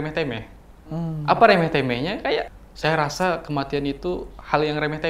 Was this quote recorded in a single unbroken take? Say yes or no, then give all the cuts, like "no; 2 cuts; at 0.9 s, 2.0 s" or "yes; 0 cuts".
no; 1 cut; at 2.5 s